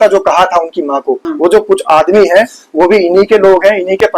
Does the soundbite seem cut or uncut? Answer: cut